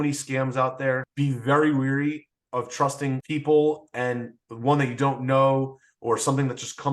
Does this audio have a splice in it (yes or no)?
yes